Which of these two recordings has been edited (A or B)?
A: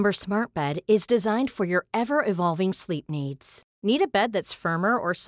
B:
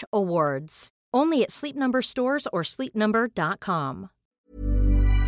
B